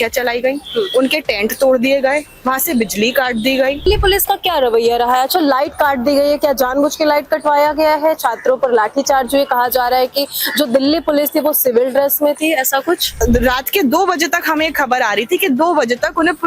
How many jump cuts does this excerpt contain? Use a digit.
2